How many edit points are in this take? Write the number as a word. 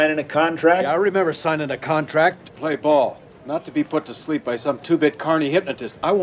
one